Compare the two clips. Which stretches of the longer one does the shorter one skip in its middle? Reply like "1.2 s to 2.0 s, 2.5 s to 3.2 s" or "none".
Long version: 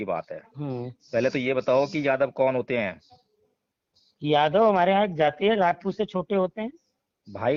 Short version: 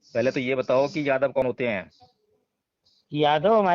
2.4 s to 2.5 s